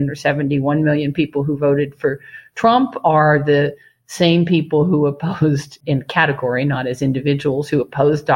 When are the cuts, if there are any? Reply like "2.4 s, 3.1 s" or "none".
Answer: 5.8 s